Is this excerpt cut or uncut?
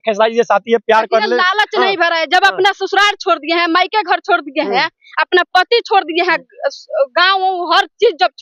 uncut